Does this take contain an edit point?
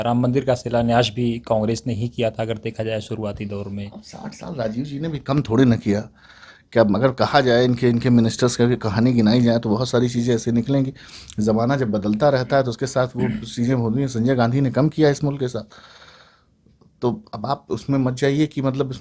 no; 0 cuts

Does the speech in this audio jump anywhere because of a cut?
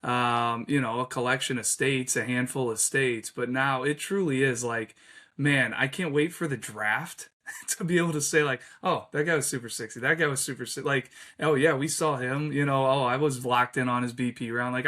no; 0 cuts

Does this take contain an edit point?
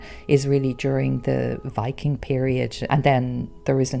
yes; 2 cuts; at 1.7 s, 2.8 s

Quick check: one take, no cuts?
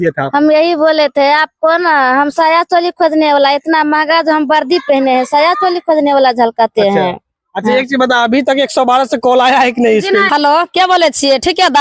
no; 1 cut; at 10.3 s

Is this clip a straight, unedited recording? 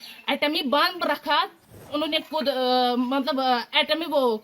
no; 1 cut; at 1.8 s

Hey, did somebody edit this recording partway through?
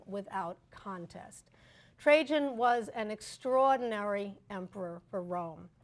no; 0 cuts

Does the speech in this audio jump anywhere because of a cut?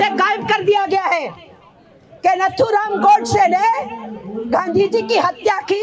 no; 0 cuts

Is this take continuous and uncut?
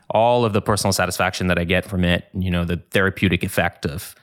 yes; 0 cuts

